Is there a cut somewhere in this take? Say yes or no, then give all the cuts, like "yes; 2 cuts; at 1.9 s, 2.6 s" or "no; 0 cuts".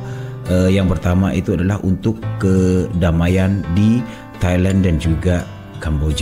no; 0 cuts